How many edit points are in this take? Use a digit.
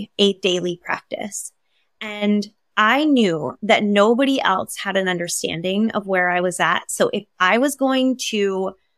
0